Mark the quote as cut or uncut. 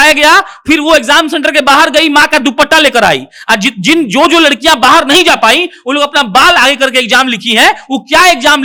uncut